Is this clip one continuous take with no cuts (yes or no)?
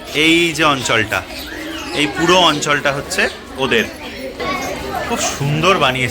no